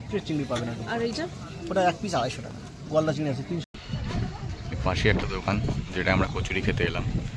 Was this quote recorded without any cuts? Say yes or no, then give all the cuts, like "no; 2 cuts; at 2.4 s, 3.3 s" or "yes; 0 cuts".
no; 1 cut; at 3.7 s